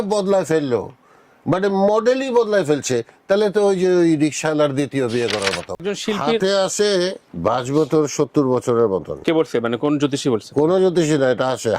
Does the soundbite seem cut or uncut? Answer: cut